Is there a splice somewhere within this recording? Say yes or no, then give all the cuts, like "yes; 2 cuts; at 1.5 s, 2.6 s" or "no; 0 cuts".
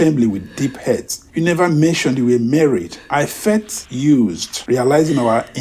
yes; 3 cuts; at 1.2 s, 3.0 s, 3.8 s